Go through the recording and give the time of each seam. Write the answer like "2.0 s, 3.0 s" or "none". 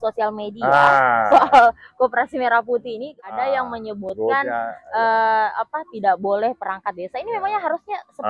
3.1 s